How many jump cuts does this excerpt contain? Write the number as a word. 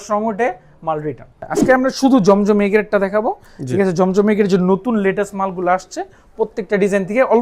one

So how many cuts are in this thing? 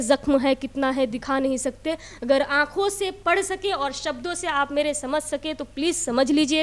zero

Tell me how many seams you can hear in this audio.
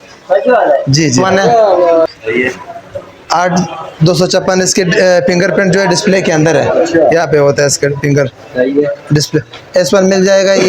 one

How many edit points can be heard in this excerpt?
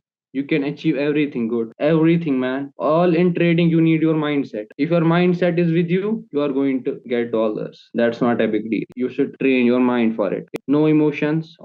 two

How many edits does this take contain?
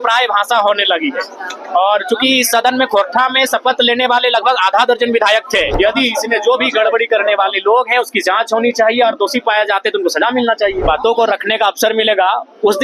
two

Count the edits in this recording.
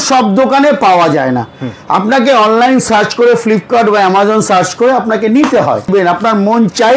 one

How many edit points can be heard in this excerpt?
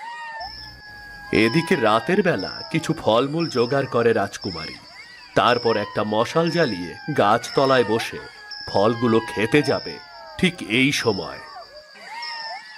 one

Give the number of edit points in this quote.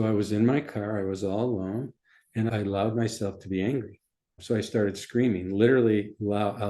two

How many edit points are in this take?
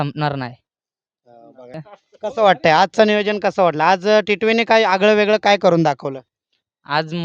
one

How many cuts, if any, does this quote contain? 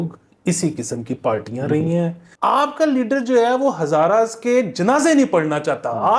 one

